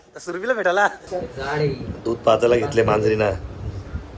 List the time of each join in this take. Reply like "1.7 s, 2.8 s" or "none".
1.0 s

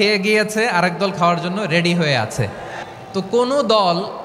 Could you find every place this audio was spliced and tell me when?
2.8 s

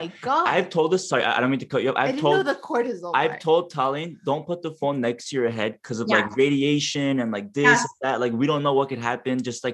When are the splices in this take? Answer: none

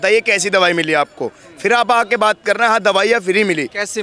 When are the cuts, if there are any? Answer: none

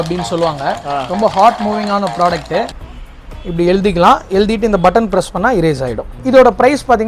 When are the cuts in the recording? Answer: 2.8 s, 6.1 s

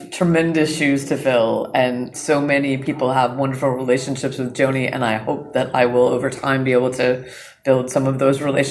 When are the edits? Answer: none

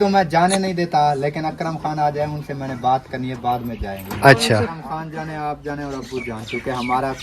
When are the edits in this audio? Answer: 4.7 s

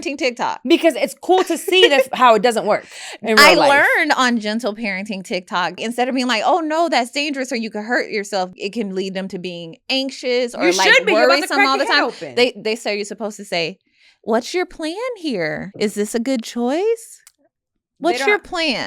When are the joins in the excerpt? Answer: 5.8 s, 8.5 s, 15.7 s

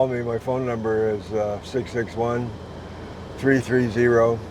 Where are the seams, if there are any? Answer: none

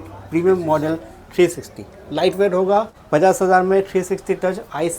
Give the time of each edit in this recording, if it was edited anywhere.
3.0 s

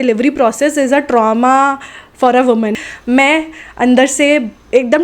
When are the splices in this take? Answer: 2.8 s

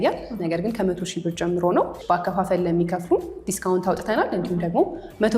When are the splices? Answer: 2.0 s

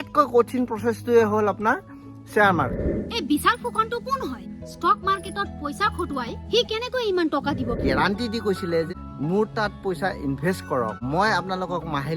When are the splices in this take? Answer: 2.9 s, 7.8 s, 8.9 s, 11.0 s

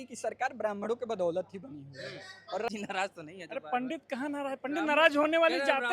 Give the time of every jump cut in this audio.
2.7 s

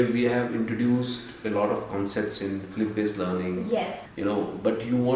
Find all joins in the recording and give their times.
4.0 s

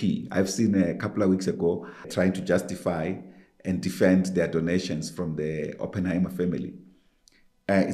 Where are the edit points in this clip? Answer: 2.1 s

